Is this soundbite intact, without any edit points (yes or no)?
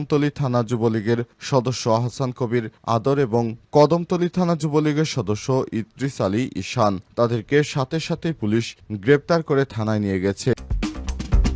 no